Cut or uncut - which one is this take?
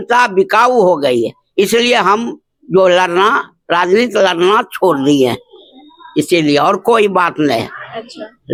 uncut